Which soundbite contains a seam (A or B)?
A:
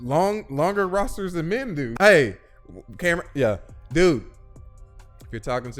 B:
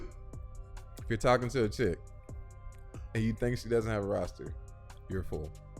A